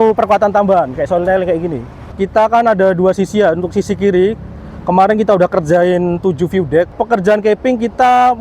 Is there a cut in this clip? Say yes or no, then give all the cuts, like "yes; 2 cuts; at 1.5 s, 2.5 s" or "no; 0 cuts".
yes; 2 cuts; at 2.1 s, 6.9 s